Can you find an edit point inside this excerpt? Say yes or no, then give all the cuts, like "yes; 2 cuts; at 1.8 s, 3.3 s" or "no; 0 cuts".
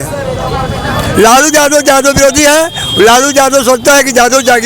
no; 0 cuts